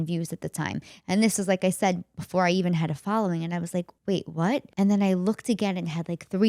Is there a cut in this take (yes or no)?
yes